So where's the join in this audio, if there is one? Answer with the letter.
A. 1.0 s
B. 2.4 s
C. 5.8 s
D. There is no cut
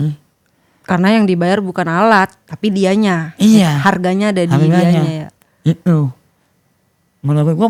D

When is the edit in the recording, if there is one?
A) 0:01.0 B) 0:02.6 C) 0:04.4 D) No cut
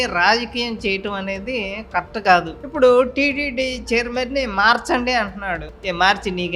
B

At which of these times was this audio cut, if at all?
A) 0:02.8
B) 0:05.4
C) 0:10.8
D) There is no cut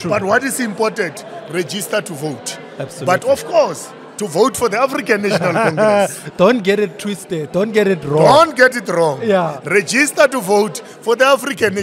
D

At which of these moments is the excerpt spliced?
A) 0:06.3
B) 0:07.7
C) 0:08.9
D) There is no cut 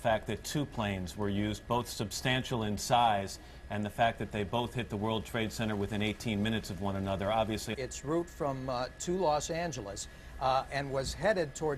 D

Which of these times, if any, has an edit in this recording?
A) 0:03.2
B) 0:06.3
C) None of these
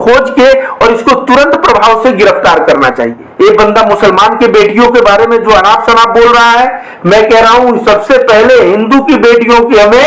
A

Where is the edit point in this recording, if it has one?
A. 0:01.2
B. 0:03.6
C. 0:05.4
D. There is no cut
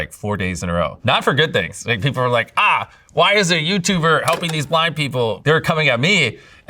C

